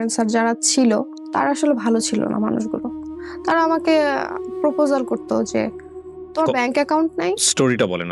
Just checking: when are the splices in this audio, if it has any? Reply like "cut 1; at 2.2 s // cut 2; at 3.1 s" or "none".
cut 1; at 1.2 s